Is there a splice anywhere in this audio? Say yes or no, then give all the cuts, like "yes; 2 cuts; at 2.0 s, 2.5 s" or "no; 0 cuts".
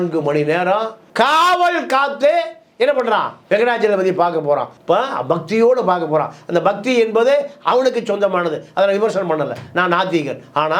no; 0 cuts